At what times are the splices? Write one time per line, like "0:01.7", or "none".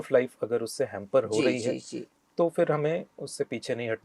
none